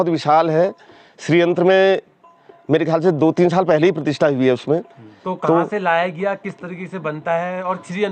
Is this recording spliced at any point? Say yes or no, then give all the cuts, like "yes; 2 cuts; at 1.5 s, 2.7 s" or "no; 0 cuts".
no; 0 cuts